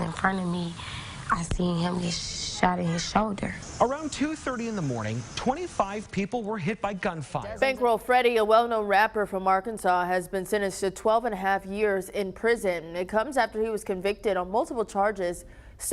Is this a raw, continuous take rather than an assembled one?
no; 1 cut; at 7.5 s

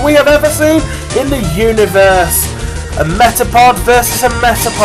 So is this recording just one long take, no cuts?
yes; 0 cuts

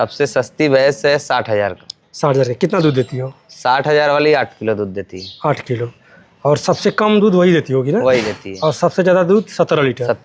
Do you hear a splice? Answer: no; 0 cuts

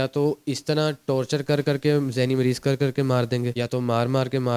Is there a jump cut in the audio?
yes; 1 cut; at 3.5 s

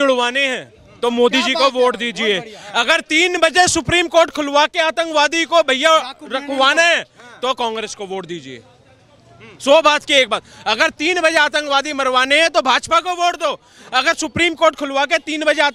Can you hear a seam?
no; 0 cuts

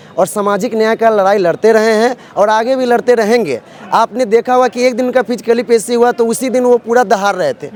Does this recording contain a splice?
no; 0 cuts

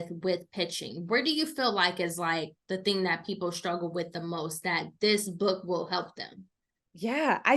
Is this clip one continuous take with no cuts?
yes; 0 cuts

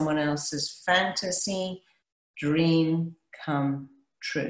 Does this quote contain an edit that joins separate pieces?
no; 0 cuts

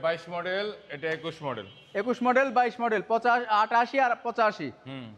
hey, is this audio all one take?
yes; 0 cuts

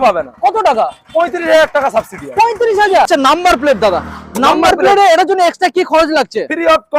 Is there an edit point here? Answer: yes; 1 cut; at 3.1 s

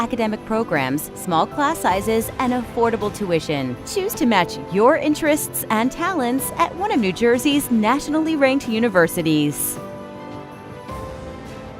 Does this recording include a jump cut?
yes; 1 cut; at 9.6 s

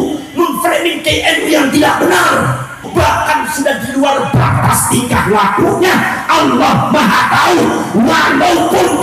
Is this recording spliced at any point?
yes; 1 cut; at 2.9 s

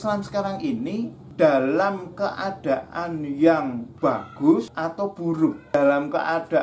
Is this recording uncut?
no; 1 cut; at 5.1 s

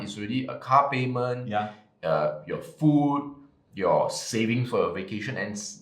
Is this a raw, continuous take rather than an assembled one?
yes; 0 cuts

